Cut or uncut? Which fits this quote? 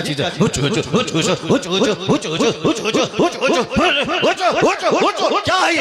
uncut